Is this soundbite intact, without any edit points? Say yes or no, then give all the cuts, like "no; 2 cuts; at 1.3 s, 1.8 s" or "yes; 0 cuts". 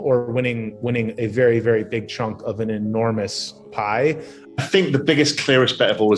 no; 1 cut; at 4.6 s